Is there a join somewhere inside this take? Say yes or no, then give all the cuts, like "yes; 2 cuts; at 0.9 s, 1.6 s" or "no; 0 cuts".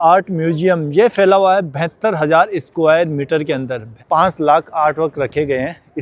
no; 0 cuts